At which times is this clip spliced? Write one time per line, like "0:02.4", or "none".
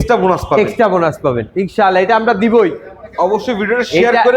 none